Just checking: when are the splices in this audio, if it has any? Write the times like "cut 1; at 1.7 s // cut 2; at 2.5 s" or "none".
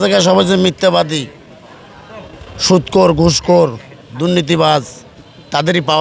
none